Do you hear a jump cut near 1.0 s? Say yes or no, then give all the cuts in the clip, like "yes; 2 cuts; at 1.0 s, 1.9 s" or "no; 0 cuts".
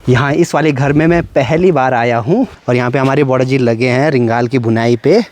no; 1 cut; at 2.6 s